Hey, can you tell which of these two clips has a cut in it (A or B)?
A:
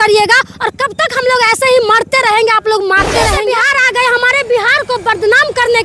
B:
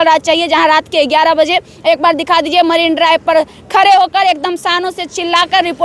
A